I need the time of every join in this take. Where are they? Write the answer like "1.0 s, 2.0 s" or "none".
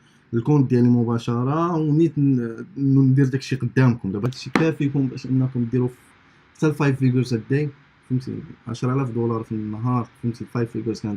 4.2 s